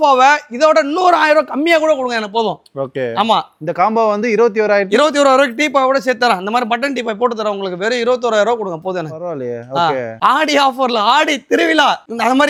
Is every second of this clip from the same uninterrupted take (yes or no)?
yes